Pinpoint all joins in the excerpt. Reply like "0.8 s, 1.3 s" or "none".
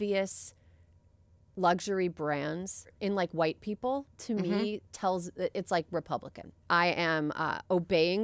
3.0 s, 6.6 s